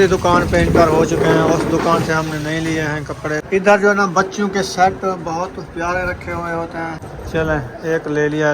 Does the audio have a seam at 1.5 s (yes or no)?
no